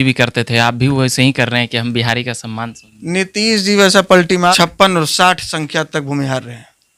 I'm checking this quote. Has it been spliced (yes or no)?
yes